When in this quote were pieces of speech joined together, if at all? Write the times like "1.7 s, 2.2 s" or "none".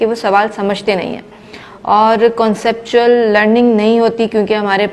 none